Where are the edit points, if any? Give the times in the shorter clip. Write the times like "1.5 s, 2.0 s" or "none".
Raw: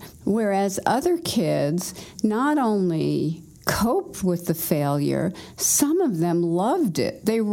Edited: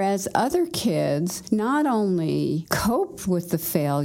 1.4 s, 2.7 s

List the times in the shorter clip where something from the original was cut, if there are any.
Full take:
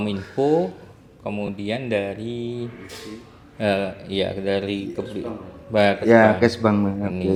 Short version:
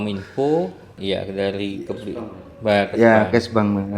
0.9 s

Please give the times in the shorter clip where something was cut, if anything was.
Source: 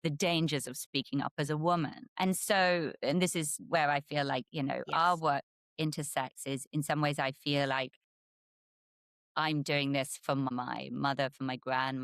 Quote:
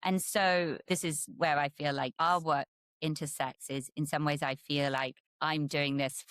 0.9 s, 2.1 s, 5.2 s

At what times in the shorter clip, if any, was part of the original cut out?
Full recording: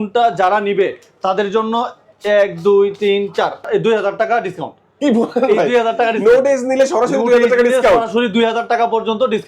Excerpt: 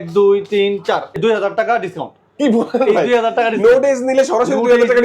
1.2 s

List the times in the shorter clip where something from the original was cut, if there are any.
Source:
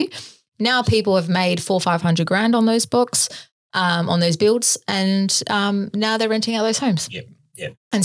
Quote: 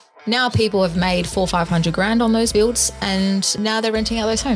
2.5 s, 3.5 s

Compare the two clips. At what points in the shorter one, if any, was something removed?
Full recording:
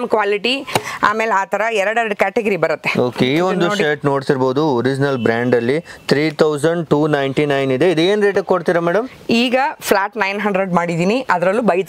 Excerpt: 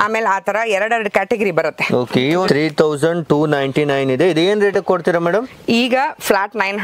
2.5 s

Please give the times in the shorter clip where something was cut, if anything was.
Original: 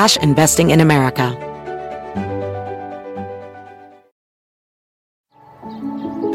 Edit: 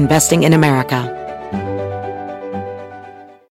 1.0 s

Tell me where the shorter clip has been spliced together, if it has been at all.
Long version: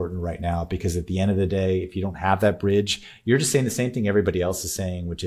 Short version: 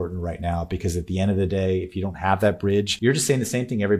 2.9 s

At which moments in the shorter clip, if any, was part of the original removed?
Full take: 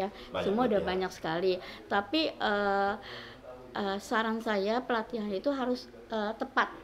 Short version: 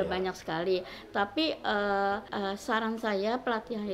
2.3 s

